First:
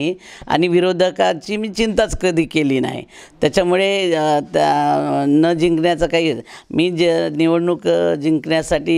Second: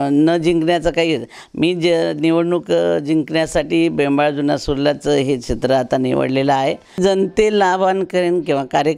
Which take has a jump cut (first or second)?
second